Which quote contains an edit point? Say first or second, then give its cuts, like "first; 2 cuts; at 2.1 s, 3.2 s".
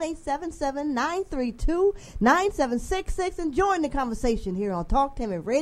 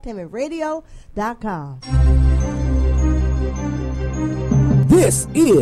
second; 1 cut; at 1.7 s